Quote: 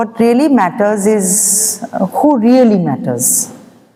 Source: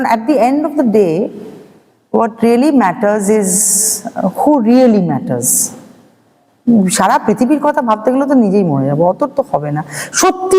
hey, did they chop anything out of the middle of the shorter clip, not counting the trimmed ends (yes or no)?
no